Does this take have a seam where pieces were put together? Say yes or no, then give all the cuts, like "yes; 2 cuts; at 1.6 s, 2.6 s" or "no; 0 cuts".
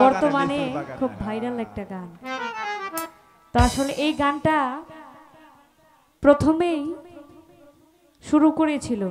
no; 0 cuts